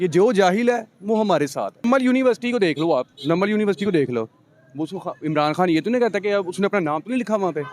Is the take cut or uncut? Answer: cut